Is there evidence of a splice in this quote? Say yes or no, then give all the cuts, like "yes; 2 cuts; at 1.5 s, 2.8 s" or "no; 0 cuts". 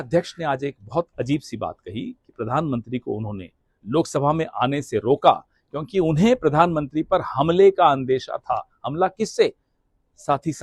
no; 0 cuts